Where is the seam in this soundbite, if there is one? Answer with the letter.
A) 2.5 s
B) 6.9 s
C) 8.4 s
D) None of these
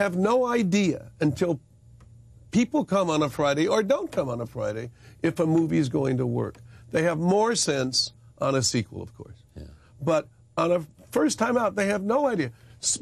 D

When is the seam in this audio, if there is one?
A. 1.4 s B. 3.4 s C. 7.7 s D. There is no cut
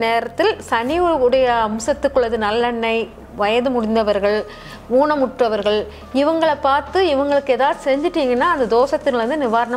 D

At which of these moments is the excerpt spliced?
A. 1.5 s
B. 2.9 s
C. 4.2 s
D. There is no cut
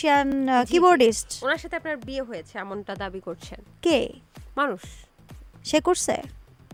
D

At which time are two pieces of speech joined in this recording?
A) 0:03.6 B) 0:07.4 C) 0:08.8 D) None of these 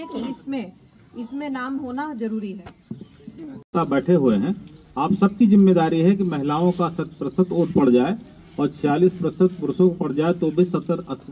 A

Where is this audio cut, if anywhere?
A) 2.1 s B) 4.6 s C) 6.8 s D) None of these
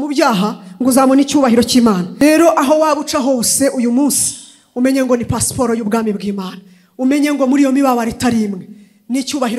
A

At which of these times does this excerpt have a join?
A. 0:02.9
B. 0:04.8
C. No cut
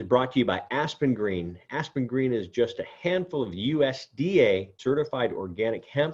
B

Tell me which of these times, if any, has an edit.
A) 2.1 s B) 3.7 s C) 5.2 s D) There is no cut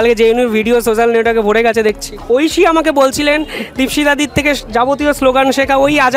A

